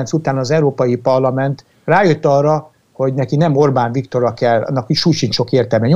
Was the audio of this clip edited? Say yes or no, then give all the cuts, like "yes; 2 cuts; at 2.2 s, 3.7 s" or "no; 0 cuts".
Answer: no; 0 cuts